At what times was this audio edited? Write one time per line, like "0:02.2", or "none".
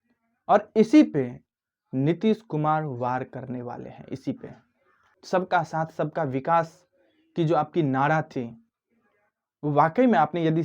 0:04.9